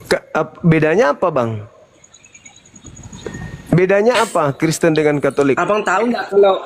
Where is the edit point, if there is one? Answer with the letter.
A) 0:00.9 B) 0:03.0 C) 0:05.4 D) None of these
B